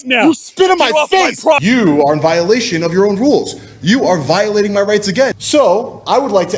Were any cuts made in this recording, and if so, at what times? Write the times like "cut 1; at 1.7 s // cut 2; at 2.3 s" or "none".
cut 1; at 1.6 s // cut 2; at 5.4 s

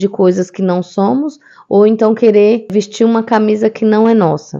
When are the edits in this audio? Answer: cut 1; at 2.7 s

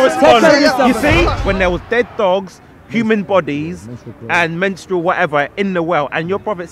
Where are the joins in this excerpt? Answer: cut 1; at 1.3 s

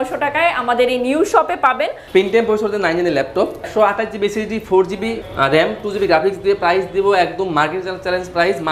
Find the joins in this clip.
cut 1; at 2.0 s // cut 2; at 3.6 s

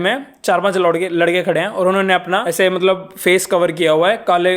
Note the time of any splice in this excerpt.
cut 1; at 2.5 s

